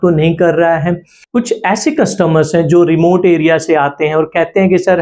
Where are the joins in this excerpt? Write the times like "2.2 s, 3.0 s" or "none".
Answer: 1.1 s

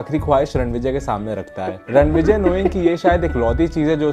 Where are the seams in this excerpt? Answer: 1.8 s

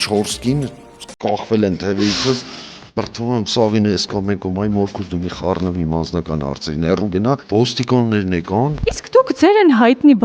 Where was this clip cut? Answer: 7.4 s, 8.8 s

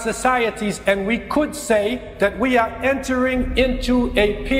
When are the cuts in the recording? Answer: 2.1 s

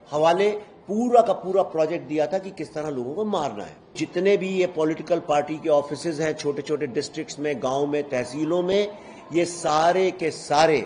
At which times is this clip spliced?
3.9 s

